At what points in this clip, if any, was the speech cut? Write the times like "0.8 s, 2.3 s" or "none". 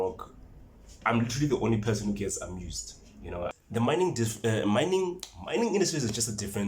3.5 s